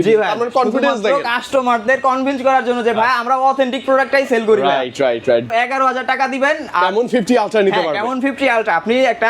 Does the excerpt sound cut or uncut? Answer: cut